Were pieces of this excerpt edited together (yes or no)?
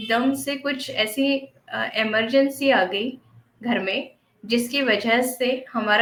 no